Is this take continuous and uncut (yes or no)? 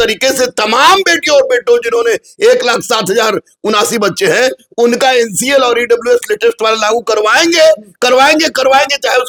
yes